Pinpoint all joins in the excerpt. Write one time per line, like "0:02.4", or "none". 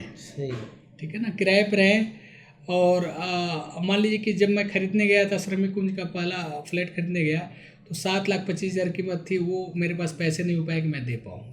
none

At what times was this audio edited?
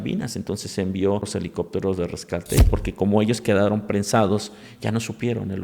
0:01.3
0:02.7

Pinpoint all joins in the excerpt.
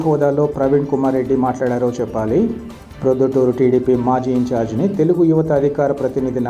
none

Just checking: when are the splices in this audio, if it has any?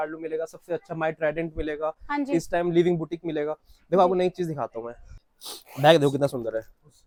none

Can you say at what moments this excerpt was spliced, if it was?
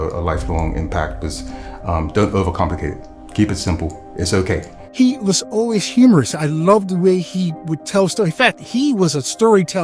0:04.8

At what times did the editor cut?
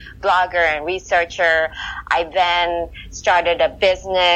none

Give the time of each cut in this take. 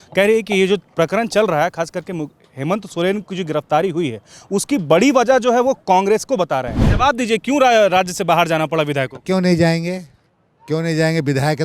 0:06.8

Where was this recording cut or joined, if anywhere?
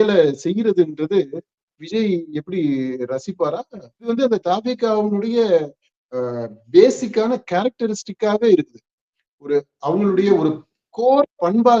0:04.1

